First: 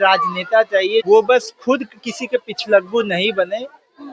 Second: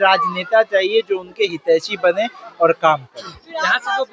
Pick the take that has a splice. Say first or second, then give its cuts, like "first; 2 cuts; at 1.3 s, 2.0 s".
first; 1 cut; at 1.0 s